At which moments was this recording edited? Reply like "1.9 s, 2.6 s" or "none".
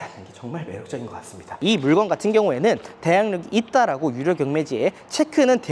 1.6 s